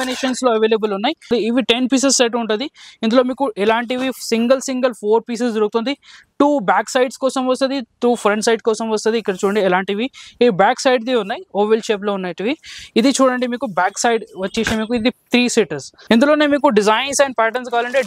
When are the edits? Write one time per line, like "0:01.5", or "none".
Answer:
0:01.3
0:15.9